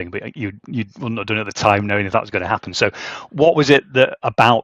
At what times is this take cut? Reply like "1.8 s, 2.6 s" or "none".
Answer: none